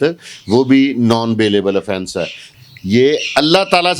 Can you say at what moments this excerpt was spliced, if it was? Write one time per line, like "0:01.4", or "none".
0:02.4